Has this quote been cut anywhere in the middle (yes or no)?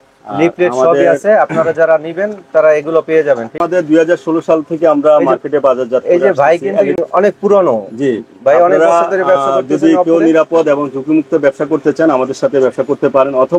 yes